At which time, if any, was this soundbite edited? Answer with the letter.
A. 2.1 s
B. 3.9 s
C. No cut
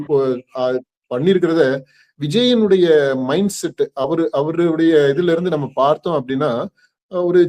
C